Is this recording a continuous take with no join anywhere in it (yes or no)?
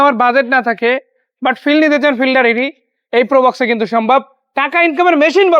yes